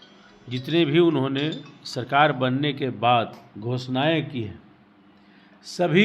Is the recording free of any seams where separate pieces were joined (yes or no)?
yes